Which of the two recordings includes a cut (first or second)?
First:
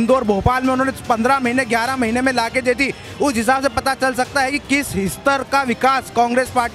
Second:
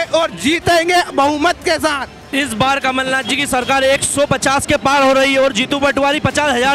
second